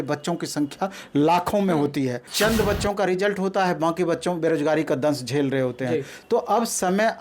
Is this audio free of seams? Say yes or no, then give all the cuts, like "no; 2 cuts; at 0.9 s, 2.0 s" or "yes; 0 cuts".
no; 1 cut; at 2.3 s